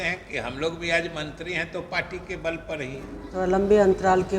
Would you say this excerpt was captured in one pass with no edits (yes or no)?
no